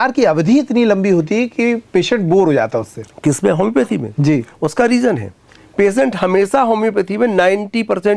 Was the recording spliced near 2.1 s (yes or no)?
no